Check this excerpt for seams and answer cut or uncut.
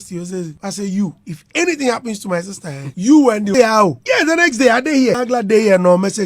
cut